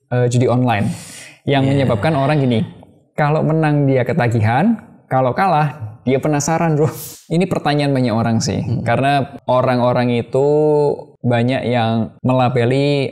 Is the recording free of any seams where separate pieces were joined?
no; 4 cuts; at 7.1 s, 9.3 s, 11.1 s, 12.1 s

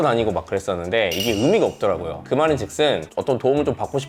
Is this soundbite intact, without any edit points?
yes; 0 cuts

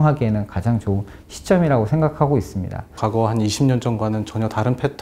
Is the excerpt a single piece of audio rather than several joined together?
no; 1 cut; at 2.9 s

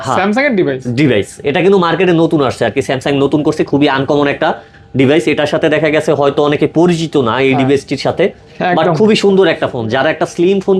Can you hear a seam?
no; 0 cuts

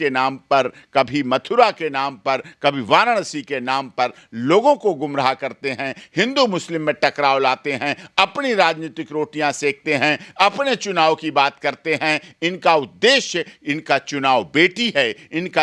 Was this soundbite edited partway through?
no; 0 cuts

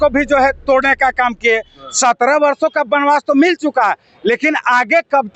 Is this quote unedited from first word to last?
yes; 0 cuts

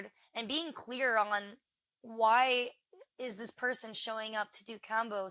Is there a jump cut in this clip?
no; 0 cuts

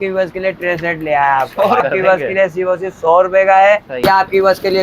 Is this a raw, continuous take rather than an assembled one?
no; 2 cuts; at 1.8 s, 4.0 s

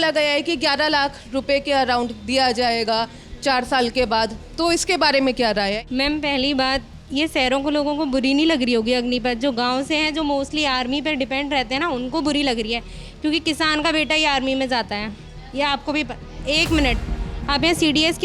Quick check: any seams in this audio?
yes; 1 cut; at 5.8 s

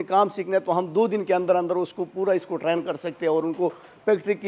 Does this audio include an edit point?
no; 0 cuts

